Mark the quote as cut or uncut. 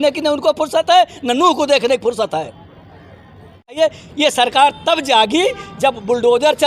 cut